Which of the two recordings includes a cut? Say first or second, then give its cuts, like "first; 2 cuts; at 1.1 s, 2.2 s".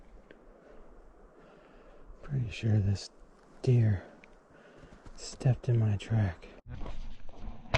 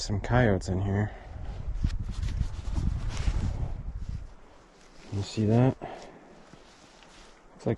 first; 1 cut; at 6.5 s